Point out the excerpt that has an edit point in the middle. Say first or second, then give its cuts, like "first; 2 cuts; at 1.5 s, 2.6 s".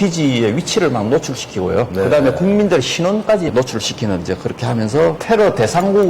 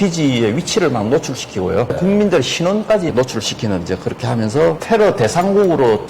second; 1 cut; at 1.9 s